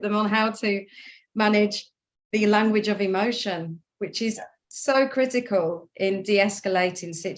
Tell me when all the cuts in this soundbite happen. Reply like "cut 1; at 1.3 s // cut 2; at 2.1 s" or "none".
none

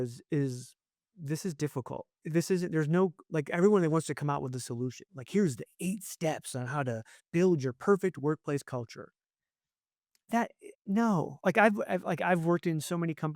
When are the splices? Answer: cut 1; at 1.1 s // cut 2; at 2.1 s

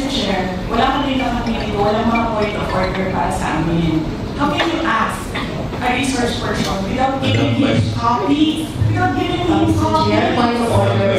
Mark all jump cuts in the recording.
none

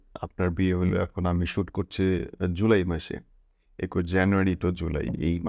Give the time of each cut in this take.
none

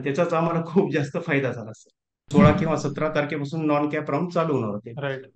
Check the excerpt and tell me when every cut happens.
cut 1; at 2.3 s

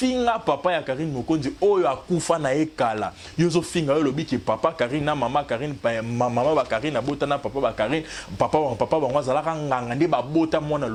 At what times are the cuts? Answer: none

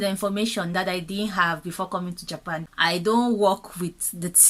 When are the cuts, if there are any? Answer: cut 1; at 2.7 s

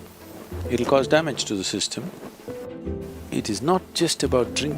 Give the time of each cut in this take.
cut 1; at 2.7 s

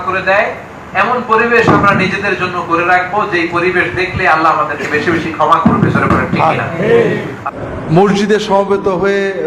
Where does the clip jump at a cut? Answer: cut 1; at 7.4 s

